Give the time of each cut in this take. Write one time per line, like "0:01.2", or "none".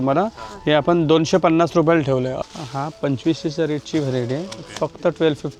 0:02.4